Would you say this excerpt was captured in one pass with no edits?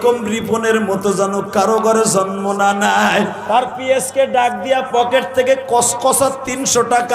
no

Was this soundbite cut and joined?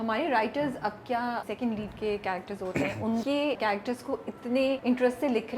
yes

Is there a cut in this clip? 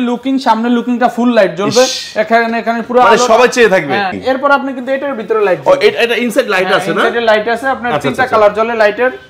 yes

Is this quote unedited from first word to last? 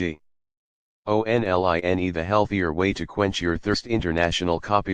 no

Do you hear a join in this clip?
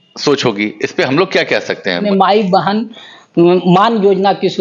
yes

